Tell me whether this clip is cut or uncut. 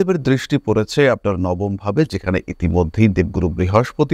uncut